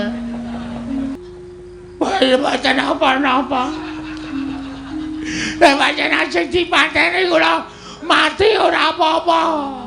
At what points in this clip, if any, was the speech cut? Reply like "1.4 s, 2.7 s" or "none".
1.1 s